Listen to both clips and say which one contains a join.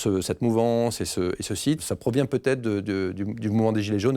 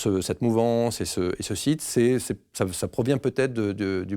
first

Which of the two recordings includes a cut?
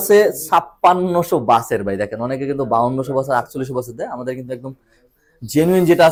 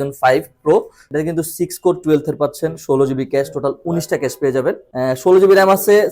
second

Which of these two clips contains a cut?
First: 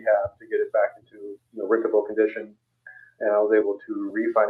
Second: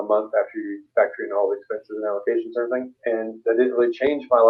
second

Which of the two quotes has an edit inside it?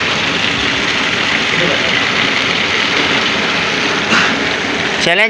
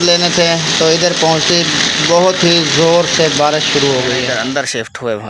second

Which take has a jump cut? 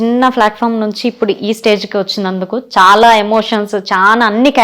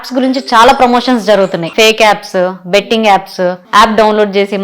second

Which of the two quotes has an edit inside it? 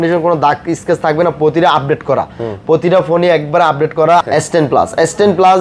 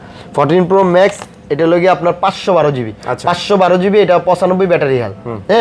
first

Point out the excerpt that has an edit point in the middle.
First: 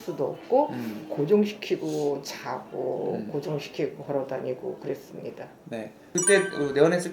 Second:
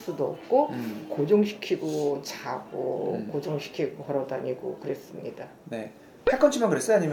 first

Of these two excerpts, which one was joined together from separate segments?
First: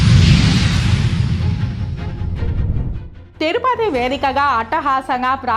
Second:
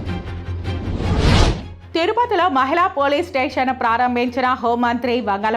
second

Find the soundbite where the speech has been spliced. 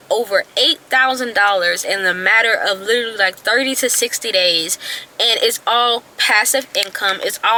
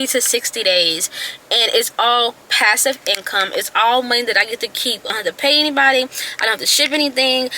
second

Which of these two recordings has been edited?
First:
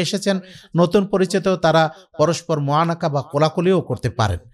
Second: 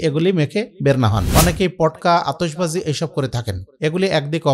second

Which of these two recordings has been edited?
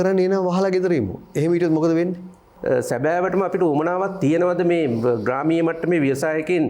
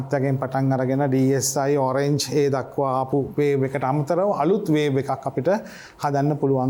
first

